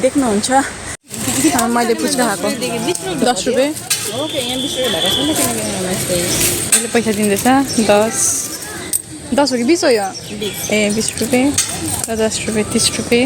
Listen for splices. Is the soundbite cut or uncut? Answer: cut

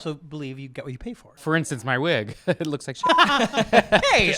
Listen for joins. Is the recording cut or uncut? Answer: cut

